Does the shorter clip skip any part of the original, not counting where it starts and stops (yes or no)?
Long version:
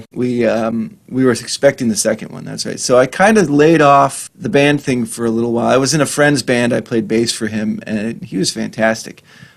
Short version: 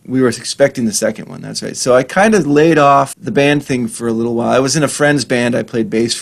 yes